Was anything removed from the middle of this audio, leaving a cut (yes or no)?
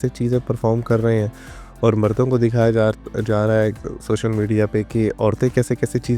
no